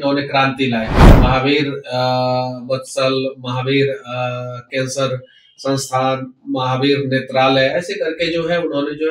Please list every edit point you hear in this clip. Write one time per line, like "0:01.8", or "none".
0:01.0